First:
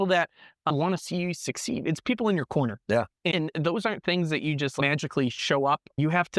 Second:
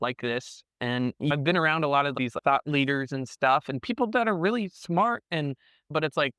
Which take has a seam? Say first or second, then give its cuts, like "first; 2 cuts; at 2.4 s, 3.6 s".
second; 1 cut; at 1.3 s